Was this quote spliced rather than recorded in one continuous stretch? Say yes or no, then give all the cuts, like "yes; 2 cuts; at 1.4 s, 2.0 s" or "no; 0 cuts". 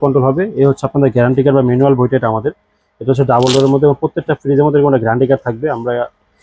no; 0 cuts